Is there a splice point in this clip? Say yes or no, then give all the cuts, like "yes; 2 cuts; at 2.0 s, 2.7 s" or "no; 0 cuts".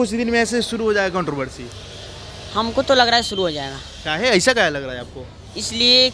no; 0 cuts